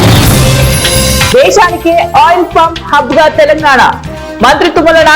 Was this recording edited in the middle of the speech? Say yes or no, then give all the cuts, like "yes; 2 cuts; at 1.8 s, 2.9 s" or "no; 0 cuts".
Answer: yes; 1 cut; at 1.3 s